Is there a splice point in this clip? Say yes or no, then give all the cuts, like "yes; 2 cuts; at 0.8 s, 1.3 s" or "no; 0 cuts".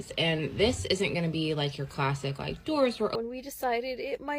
yes; 1 cut; at 3.1 s